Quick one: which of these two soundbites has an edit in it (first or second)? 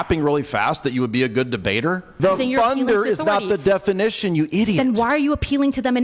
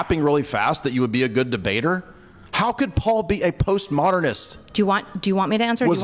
first